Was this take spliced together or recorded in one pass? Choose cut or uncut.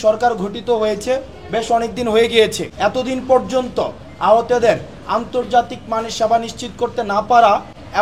cut